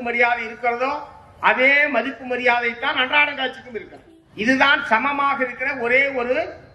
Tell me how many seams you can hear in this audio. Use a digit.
1